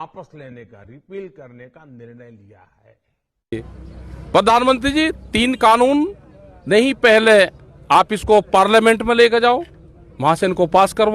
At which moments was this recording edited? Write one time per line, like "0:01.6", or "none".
0:03.6